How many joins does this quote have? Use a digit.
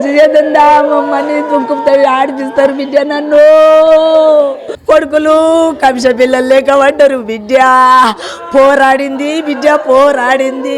1